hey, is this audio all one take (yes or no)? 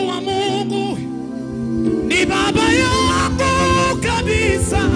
yes